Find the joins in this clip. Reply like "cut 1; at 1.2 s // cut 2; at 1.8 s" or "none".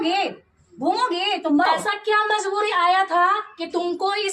cut 1; at 1.7 s